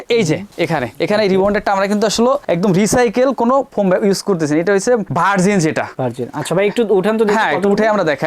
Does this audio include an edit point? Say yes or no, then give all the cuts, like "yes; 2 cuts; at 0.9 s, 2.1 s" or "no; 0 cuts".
no; 0 cuts